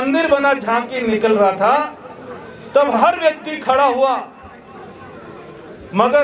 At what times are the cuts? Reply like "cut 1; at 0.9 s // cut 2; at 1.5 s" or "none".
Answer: none